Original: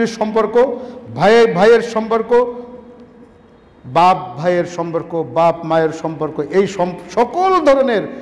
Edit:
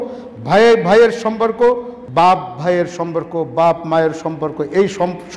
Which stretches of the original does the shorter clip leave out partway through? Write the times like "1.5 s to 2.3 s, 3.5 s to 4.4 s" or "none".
2.7 s to 3.7 s